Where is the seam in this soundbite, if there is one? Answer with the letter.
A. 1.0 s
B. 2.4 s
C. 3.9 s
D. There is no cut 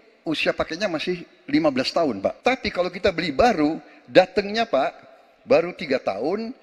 B